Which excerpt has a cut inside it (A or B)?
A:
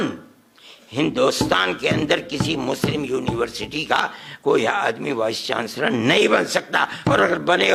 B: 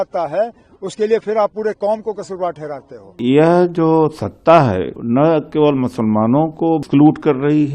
B